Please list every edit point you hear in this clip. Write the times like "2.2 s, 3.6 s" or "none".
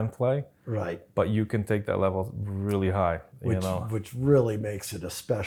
none

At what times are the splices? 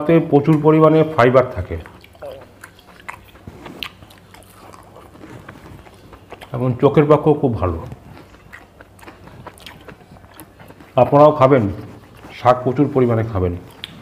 none

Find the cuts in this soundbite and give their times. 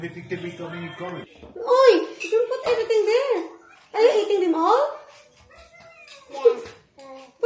1.3 s

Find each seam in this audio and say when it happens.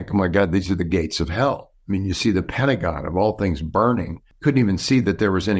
4.2 s

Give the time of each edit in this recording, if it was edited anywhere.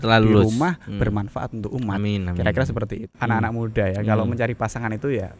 3.1 s

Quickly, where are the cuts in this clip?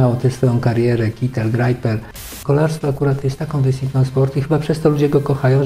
2.4 s

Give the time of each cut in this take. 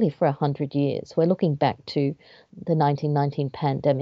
none

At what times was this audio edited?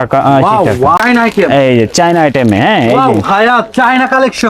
1.0 s

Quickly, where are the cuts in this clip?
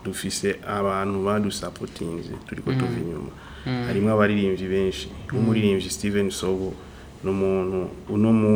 none

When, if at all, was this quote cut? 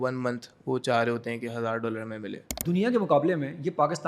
2.6 s

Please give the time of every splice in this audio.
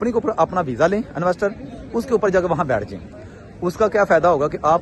none

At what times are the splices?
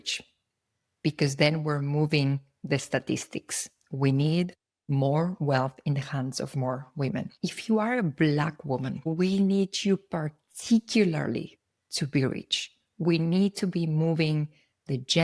none

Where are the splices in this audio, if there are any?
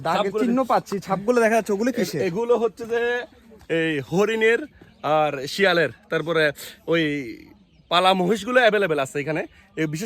none

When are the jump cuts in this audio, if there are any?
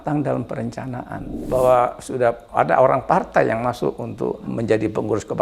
1.3 s, 4.5 s

